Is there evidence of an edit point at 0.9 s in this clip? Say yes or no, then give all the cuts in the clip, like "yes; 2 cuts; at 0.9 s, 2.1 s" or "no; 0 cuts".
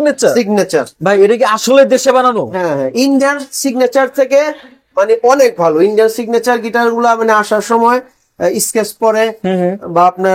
yes; 1 cut; at 0.9 s